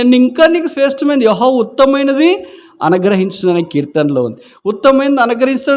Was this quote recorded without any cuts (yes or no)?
yes